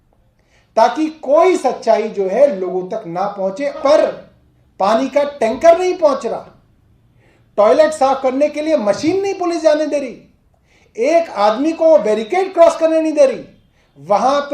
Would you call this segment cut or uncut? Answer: cut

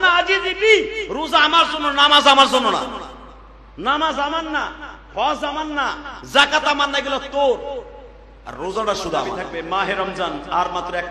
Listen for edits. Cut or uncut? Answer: cut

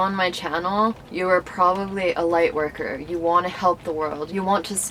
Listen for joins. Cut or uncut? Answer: cut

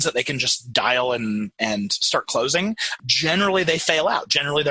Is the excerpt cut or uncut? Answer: cut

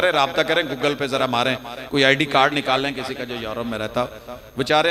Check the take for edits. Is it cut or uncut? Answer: uncut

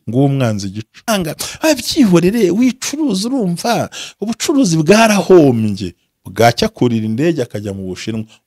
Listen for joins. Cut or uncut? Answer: cut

